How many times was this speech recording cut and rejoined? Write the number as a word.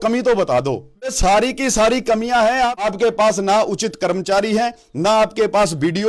two